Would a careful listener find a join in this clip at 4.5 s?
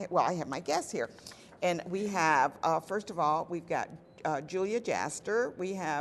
yes; 1 cut; at 4.5 s

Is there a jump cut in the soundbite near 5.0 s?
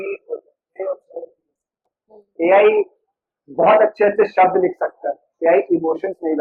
no; 0 cuts

